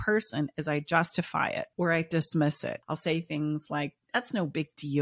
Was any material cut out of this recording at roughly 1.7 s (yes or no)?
yes